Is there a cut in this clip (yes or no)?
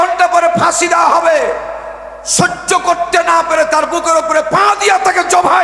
no